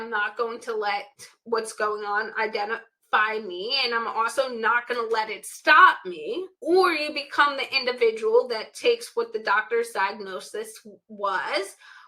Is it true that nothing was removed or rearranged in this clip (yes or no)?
no